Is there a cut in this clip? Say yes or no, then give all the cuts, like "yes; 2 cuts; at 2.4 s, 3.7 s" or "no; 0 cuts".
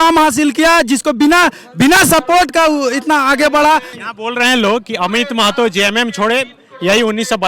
yes; 1 cut; at 3.9 s